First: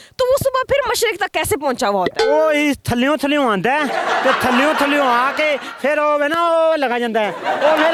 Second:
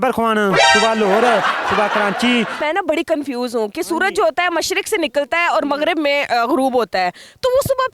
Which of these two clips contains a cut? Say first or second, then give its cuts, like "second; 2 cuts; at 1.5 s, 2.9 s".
second; 1 cut; at 2.6 s